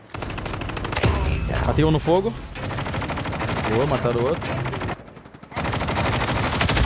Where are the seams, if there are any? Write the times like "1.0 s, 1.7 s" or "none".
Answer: 4.9 s